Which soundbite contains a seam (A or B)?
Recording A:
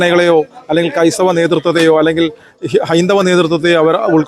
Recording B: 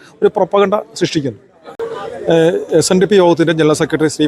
B